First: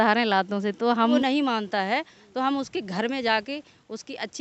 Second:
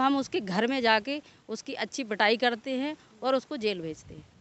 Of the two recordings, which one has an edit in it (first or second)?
first